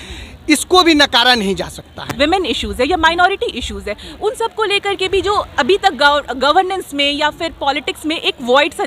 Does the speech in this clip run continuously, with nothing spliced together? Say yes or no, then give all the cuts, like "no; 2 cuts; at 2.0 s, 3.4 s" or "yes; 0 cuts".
no; 1 cut; at 2.1 s